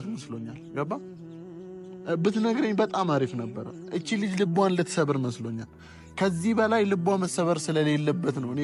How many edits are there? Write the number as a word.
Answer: zero